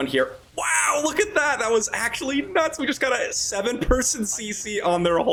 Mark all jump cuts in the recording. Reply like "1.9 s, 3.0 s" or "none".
none